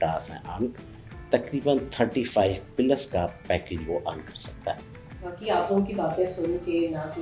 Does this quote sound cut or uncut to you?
cut